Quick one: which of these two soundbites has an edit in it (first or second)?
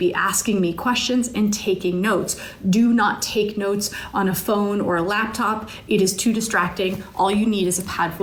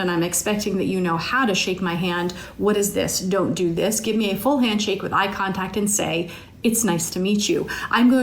second